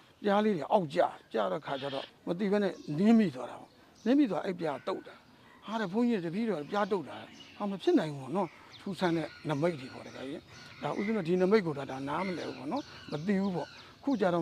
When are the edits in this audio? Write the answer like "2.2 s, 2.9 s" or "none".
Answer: 2.1 s, 8.7 s